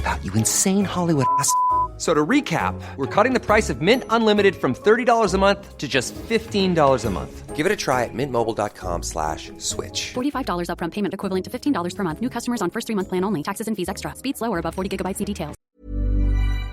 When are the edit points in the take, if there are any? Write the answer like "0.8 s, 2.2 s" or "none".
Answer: 15.6 s